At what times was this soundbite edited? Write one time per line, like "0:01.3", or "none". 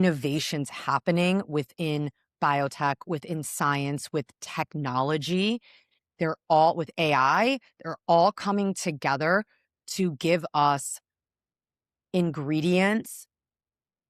none